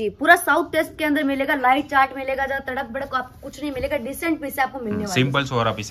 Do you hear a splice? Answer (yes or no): no